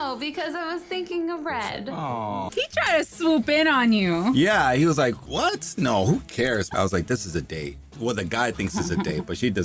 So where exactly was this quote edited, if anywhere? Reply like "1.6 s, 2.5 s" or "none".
6.7 s